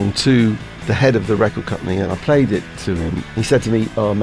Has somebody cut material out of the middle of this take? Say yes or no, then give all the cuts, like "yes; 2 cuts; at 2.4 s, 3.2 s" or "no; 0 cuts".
yes; 2 cuts; at 2.1 s, 3.2 s